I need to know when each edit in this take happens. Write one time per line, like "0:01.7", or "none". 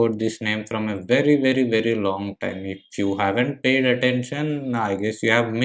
none